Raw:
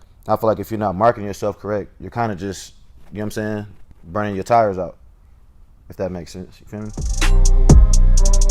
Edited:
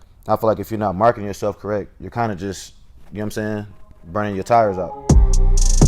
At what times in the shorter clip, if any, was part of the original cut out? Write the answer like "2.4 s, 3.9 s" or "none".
5.0 s